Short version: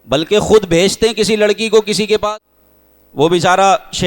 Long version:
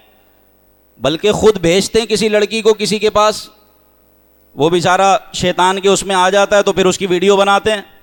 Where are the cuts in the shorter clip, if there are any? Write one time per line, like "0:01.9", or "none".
0:02.3